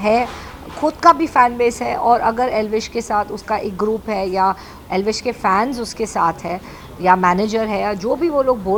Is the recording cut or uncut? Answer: uncut